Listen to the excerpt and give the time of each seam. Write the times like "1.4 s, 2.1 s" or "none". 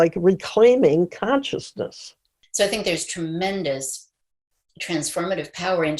2.4 s